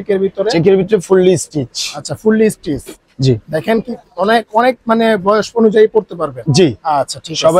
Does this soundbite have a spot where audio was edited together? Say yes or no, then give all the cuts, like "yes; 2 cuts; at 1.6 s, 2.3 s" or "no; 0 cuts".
no; 0 cuts